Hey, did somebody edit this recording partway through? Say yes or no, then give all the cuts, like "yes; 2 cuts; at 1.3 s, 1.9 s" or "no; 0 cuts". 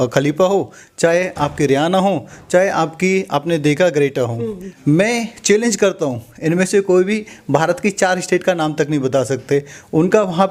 yes; 1 cut; at 4.7 s